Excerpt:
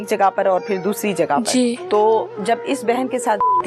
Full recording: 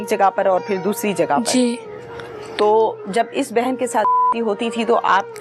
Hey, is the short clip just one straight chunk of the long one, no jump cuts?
no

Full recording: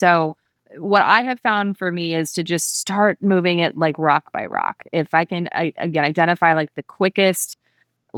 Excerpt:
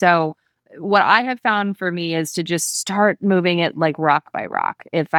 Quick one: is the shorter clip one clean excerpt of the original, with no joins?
yes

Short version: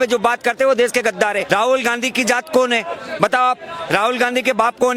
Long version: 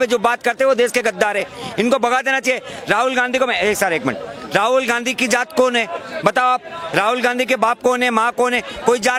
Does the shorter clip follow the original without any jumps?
no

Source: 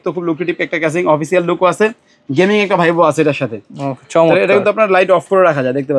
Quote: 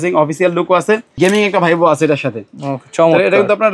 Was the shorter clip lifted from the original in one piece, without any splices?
no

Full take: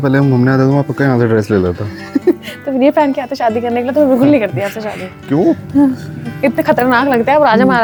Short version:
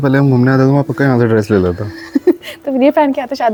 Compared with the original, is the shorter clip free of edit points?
yes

